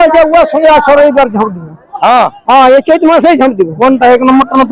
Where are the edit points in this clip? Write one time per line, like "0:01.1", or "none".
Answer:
none

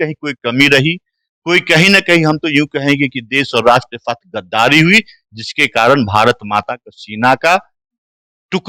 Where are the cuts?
none

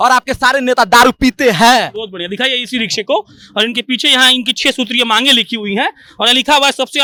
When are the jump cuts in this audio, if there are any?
none

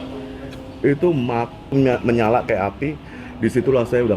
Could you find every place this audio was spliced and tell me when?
0:01.7

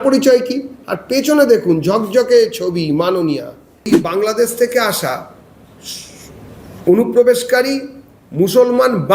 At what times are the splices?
0:04.0

